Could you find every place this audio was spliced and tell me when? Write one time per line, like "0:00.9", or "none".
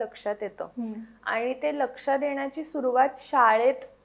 none